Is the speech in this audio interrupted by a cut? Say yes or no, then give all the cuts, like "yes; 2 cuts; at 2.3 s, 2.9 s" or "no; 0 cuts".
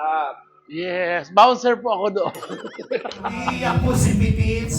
yes; 1 cut; at 3.6 s